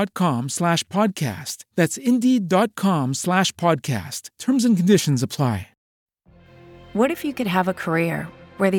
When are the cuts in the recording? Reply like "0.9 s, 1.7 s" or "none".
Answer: 6.0 s